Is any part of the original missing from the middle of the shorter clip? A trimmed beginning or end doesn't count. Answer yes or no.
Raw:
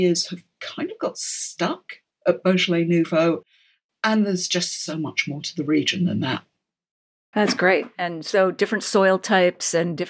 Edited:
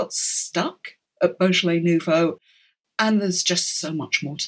no